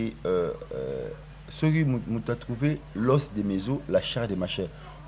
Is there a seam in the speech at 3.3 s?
no; 0 cuts

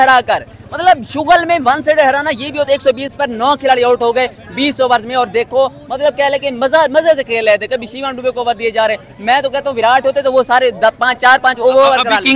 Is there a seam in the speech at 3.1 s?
no; 0 cuts

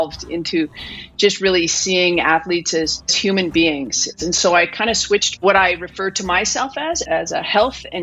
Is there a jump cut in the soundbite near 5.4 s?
yes; 4 cuts; at 3.2 s, 4.1 s, 5.4 s, 7.0 s

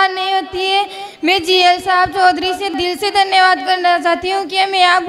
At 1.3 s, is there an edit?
no; 1 cut; at 2.7 s

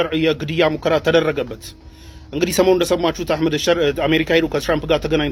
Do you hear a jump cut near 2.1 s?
no; 0 cuts

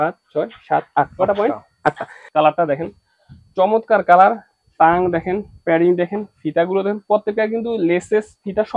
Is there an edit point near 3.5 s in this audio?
no; 1 cut; at 2.1 s

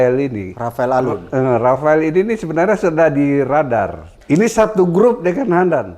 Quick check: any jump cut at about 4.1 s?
yes; 1 cut; at 4.1 s

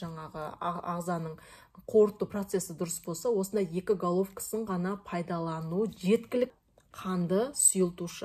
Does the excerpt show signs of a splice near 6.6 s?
yes; 1 cut; at 6.6 s

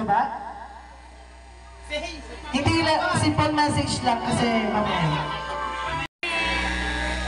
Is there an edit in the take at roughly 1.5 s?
no; 1 cut; at 6.2 s

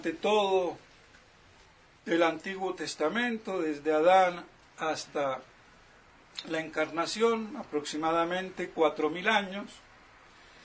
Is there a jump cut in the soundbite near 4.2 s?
yes; 1 cut; at 4.2 s

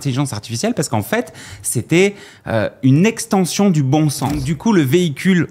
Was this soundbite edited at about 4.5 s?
yes; 1 cut; at 4.5 s

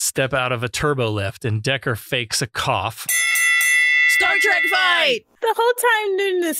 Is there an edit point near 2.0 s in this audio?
no; 1 cut; at 5.2 s

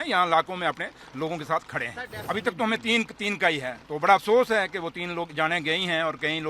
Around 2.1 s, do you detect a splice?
yes; 1 cut; at 2.1 s

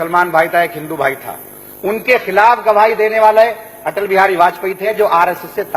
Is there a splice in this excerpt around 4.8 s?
yes; 1 cut; at 4.8 s

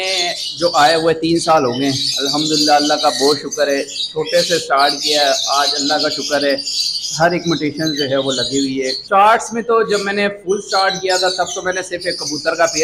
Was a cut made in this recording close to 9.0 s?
yes; 1 cut; at 9.0 s

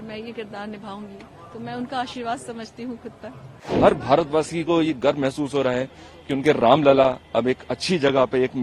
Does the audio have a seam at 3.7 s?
yes; 1 cut; at 3.7 s

